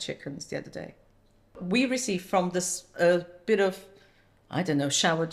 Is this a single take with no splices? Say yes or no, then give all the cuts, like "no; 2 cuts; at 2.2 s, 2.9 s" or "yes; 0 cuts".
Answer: no; 1 cut; at 1.5 s